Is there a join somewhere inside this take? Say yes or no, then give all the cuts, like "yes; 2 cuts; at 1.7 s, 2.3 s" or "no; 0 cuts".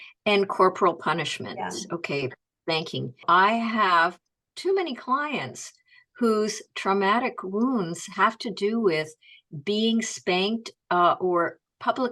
yes; 1 cut; at 3.2 s